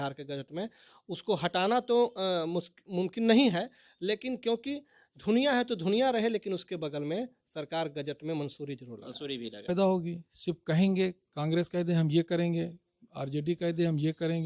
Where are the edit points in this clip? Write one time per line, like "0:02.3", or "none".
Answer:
0:09.7